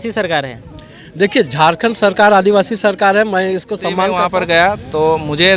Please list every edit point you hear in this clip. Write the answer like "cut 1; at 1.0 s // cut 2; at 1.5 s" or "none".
cut 1; at 4.1 s